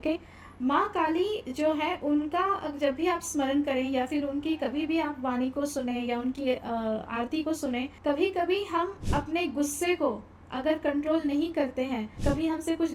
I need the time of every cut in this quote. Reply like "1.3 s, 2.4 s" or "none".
7.9 s, 12.1 s